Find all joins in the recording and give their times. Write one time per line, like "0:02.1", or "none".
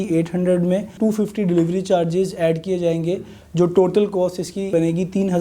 0:00.9
0:04.7